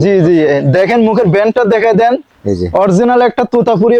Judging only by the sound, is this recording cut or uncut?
uncut